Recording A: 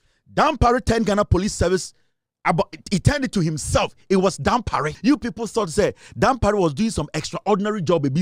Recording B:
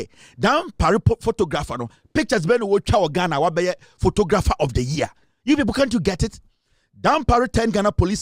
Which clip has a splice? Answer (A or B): A